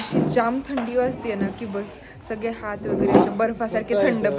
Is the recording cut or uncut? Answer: uncut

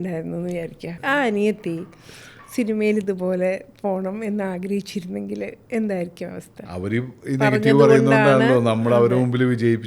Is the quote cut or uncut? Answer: cut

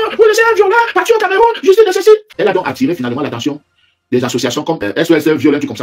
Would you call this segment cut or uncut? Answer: cut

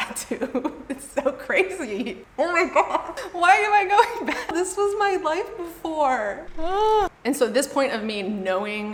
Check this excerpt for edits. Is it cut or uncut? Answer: uncut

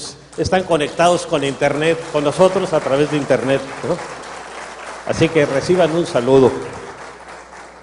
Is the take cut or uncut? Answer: uncut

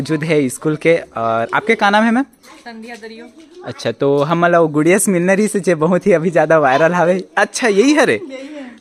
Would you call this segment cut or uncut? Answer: uncut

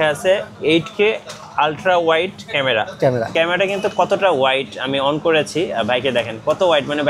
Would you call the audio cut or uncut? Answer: cut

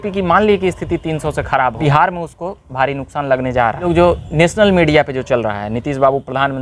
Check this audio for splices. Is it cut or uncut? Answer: cut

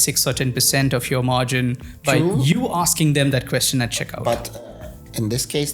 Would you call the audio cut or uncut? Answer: uncut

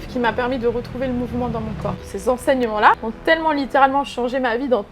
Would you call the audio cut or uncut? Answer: cut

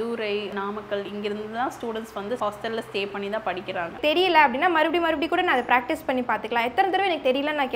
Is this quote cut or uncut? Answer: cut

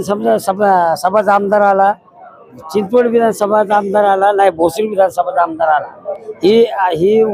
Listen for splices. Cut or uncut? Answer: uncut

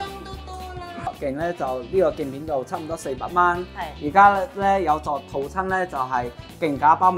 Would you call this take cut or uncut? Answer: cut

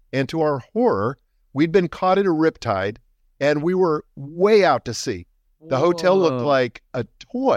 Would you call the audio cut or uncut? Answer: uncut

